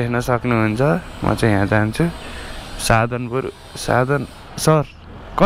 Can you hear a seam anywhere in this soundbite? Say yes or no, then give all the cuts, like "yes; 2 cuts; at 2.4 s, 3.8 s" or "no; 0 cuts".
no; 0 cuts